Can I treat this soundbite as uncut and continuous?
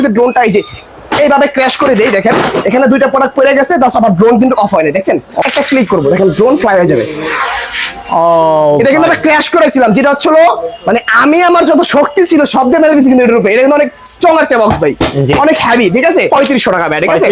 no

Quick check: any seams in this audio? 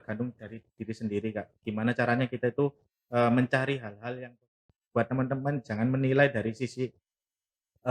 yes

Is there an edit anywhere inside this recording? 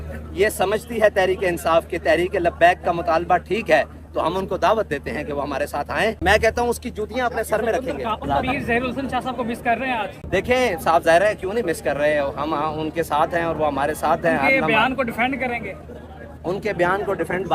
yes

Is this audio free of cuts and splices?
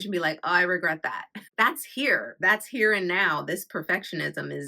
no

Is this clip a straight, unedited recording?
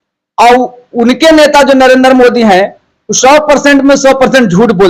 yes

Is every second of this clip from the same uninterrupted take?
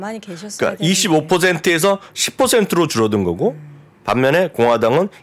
yes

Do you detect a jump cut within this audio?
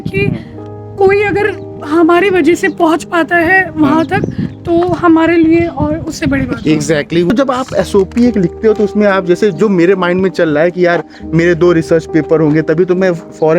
yes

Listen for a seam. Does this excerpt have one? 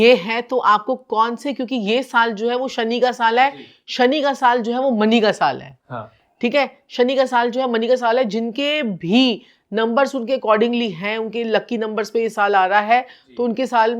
no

